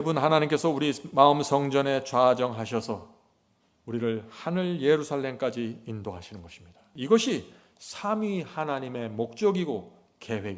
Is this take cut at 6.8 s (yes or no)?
yes